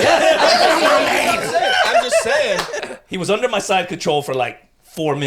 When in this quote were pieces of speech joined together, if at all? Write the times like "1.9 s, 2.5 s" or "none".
2.8 s